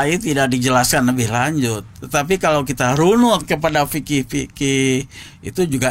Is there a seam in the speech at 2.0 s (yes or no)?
no